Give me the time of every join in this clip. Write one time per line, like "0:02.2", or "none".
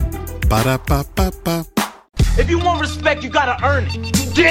0:02.0